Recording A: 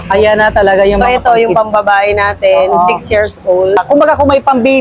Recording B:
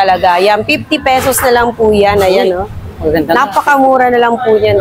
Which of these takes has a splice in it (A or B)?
A